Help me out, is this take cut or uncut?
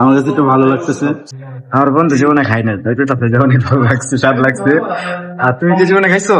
cut